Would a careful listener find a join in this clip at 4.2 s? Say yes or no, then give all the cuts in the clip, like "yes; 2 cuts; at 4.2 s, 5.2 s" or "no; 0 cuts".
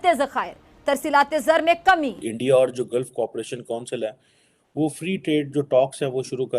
no; 1 cut; at 2.3 s